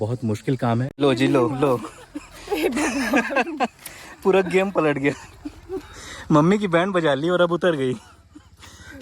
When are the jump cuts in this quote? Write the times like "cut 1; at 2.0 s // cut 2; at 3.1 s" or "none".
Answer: cut 1; at 1.0 s